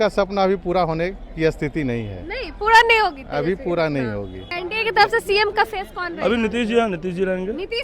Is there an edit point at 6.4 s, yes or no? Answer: no